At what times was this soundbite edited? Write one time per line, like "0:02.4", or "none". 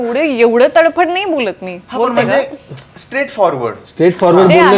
none